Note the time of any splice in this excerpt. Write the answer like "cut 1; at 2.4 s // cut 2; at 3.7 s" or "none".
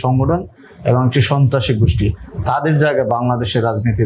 none

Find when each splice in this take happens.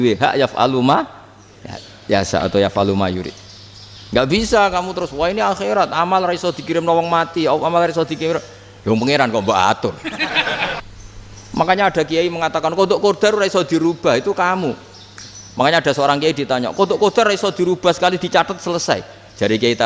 cut 1; at 10.8 s

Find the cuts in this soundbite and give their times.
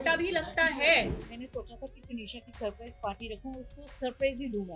cut 1; at 1.2 s

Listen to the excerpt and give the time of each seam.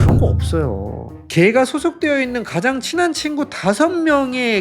cut 1; at 1.2 s

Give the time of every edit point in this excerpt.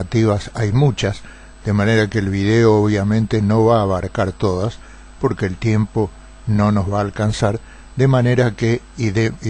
cut 1; at 1.6 s

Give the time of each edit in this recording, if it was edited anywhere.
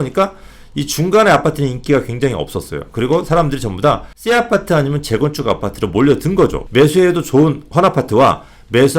cut 1; at 4.1 s // cut 2; at 6.6 s

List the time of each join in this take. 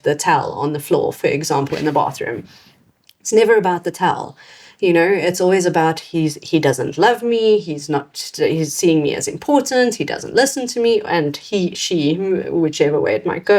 none

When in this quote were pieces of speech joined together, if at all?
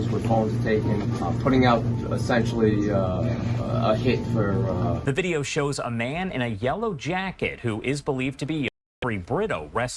cut 1; at 5.0 s

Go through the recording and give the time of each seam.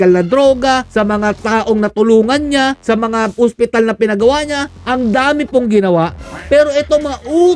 cut 1; at 0.9 s // cut 2; at 2.8 s // cut 3; at 4.7 s

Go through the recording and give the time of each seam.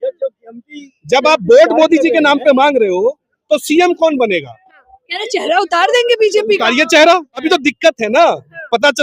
cut 1; at 7.4 s

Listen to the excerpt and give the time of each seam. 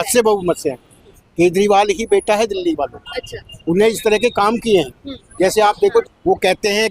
cut 1; at 1.2 s // cut 2; at 5.9 s

